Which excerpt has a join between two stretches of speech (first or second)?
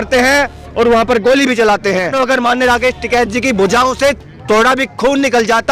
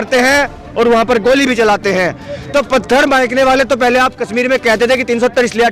first